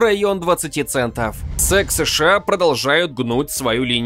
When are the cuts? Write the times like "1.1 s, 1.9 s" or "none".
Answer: 1.6 s